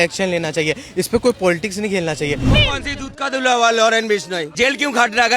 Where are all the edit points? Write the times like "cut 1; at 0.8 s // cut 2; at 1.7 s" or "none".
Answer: cut 1; at 2.5 s // cut 2; at 4.4 s